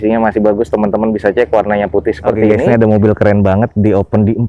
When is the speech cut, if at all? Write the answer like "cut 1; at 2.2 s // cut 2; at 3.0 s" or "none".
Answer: cut 1; at 2.6 s